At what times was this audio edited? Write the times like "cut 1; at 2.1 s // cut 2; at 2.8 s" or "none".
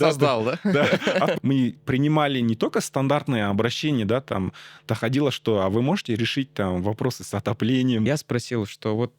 cut 1; at 1.4 s // cut 2; at 8.1 s

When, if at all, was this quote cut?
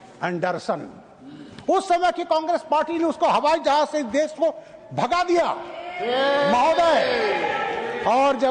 none

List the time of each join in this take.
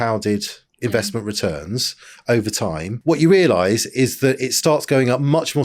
cut 1; at 2.9 s

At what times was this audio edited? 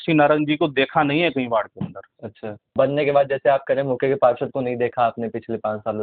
cut 1; at 2.5 s

